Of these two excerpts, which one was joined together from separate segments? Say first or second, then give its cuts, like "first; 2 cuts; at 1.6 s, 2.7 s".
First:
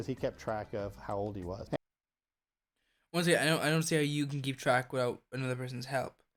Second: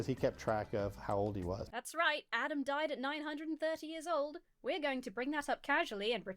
second; 1 cut; at 1.7 s